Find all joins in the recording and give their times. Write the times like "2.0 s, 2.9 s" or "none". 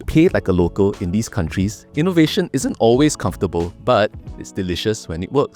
1.8 s